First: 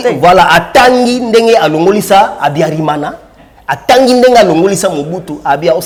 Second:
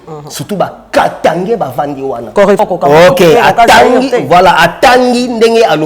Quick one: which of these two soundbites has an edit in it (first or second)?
second